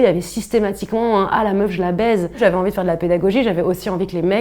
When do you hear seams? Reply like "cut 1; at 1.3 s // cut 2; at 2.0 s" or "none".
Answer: cut 1; at 2.3 s